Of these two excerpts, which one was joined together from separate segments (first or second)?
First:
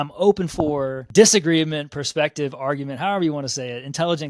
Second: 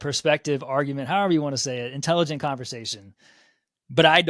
first